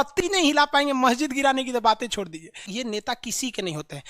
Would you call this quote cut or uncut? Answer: cut